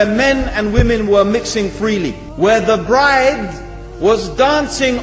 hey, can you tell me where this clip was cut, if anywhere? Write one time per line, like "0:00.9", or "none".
0:02.2

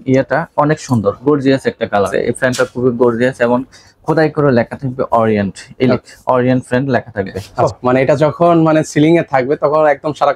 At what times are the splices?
0:02.3
0:07.4

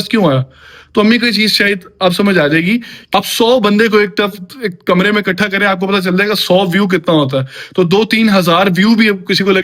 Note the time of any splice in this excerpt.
0:03.0

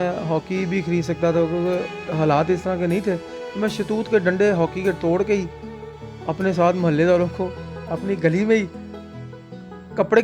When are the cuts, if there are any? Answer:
none

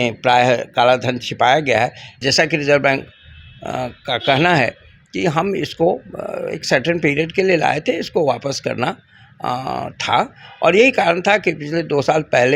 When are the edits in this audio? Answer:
0:02.1

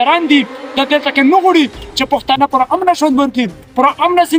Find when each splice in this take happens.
none

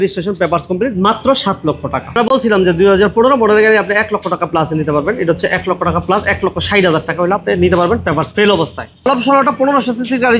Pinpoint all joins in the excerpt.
none

